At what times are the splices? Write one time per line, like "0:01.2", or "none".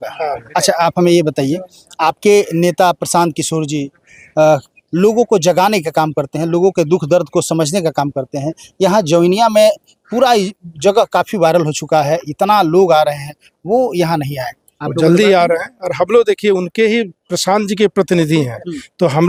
none